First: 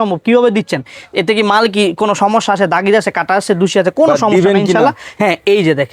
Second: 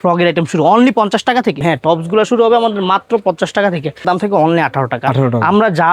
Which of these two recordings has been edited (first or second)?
second